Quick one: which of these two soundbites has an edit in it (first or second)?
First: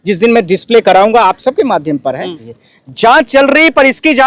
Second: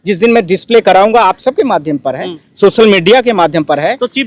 first